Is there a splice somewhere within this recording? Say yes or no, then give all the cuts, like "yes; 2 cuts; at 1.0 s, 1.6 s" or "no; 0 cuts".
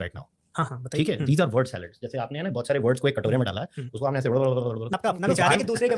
yes; 1 cut; at 4.9 s